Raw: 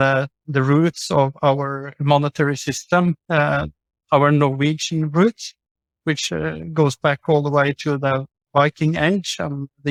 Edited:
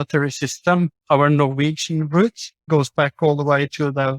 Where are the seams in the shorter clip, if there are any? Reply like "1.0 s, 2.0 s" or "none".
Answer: 1.0 s, 2.5 s